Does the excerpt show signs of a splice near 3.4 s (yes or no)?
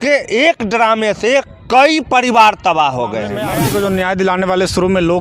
yes